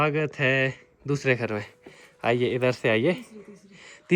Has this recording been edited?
no; 0 cuts

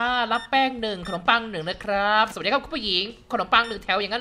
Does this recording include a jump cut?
yes; 1 cut; at 2.3 s

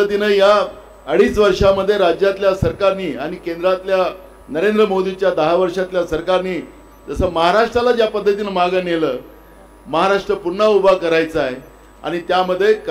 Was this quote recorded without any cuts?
yes; 0 cuts

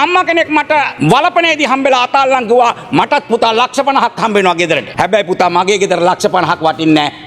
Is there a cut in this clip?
yes; 2 cuts; at 0.9 s, 4.9 s

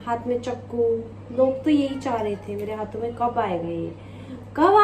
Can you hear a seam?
yes; 1 cut; at 2.5 s

